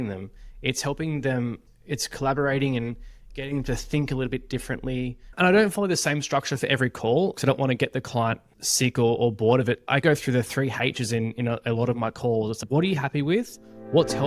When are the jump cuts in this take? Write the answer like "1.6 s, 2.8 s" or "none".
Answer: 5.3 s, 7.4 s